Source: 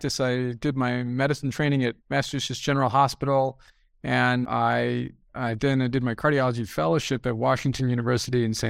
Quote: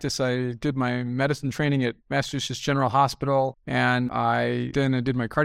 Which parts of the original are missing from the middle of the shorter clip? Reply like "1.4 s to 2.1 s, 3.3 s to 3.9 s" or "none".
3.6 s to 4.0 s, 5.1 s to 5.6 s